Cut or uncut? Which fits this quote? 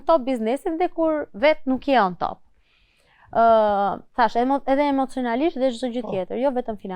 uncut